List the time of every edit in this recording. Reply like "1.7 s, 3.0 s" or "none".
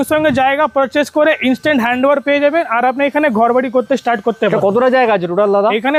none